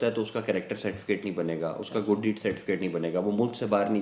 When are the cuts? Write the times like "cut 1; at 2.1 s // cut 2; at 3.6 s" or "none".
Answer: none